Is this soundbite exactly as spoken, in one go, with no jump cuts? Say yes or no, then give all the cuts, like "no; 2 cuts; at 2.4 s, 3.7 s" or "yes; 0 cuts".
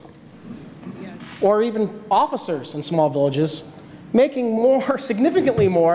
yes; 0 cuts